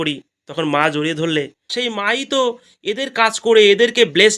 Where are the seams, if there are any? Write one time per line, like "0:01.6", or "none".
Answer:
0:01.7